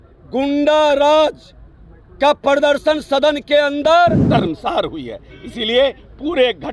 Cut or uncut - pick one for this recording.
cut